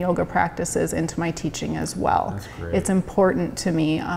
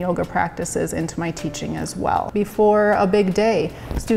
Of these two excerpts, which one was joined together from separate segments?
second; 1 cut; at 2.3 s

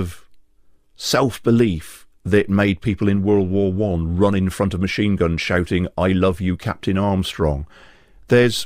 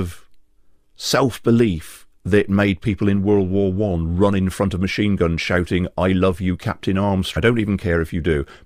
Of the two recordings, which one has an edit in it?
first; 1 cut; at 7.3 s

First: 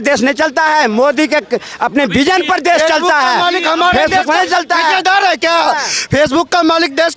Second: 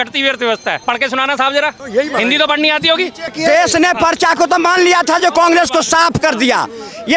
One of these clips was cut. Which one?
second; 3 cuts; at 0.8 s, 1.8 s, 3.4 s

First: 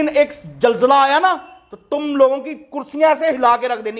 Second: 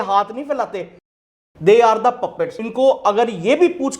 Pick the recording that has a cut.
second; 2 cuts; at 1.2 s, 2.6 s

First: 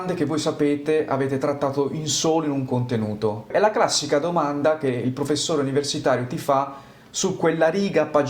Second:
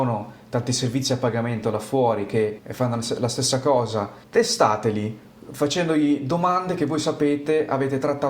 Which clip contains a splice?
second; 2 cuts; at 2.6 s, 4.2 s

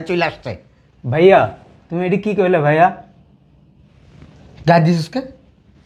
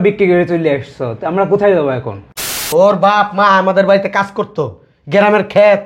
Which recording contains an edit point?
second; 1 cut; at 2.7 s

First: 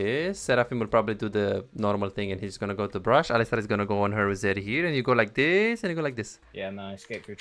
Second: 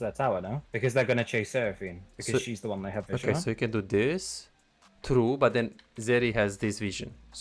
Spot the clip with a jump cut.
first; 1 cut; at 6.4 s

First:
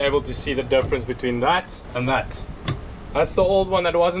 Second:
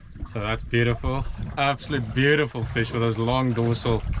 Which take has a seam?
first; 1 cut; at 1.8 s

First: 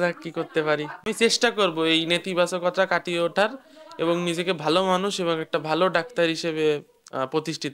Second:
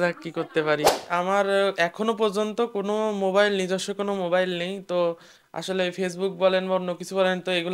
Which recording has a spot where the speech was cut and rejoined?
second; 1 cut; at 1.0 s

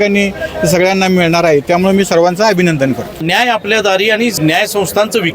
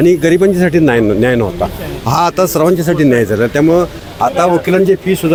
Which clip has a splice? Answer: first; 2 cuts; at 3.2 s, 4.4 s

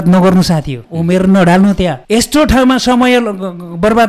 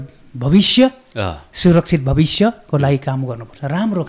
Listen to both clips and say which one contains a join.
first; 2 cuts; at 0.9 s, 2.0 s

